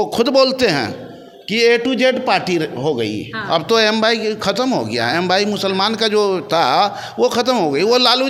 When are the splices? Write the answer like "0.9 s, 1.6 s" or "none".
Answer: none